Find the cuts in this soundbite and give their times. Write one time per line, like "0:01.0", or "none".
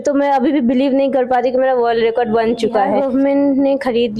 0:03.0